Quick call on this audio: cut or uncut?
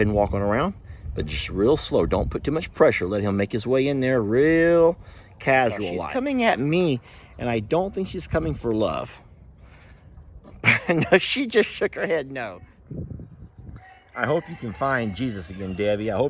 cut